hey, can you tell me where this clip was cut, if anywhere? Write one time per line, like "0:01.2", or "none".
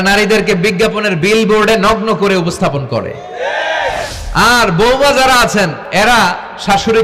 0:04.1
0:05.8